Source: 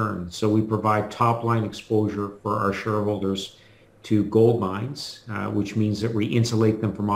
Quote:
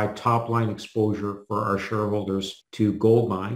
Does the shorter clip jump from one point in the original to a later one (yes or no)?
yes